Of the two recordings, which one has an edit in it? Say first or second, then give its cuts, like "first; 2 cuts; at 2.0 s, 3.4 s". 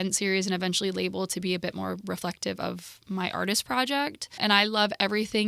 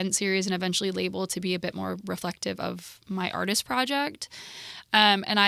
first; 1 cut; at 4.4 s